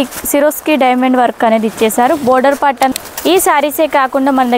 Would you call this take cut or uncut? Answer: cut